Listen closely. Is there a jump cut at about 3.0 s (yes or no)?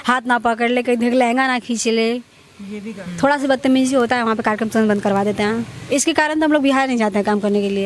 yes